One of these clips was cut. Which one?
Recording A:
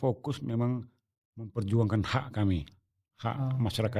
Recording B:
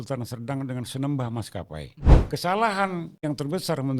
B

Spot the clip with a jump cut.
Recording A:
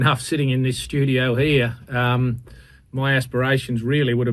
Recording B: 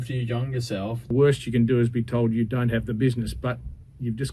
B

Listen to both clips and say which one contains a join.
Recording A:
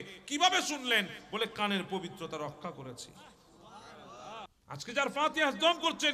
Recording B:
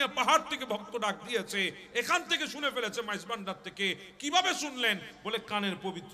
A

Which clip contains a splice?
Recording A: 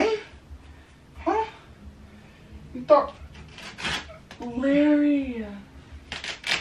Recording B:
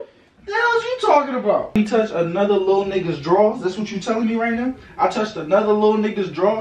B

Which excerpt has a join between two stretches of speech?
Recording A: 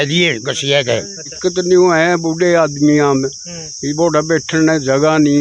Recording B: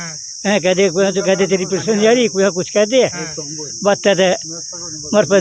A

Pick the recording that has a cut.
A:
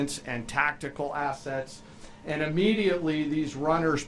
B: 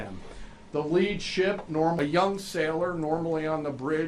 B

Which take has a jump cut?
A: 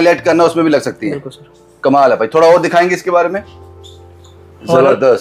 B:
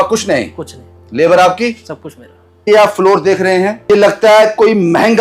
B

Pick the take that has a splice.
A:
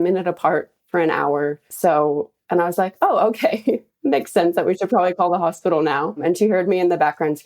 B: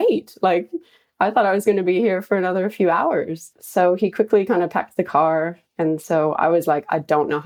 A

